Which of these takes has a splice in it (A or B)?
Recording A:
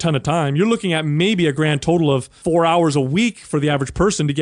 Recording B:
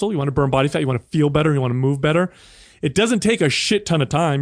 A